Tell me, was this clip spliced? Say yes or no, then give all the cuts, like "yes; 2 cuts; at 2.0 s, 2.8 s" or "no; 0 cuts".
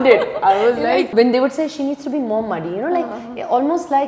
yes; 1 cut; at 1.1 s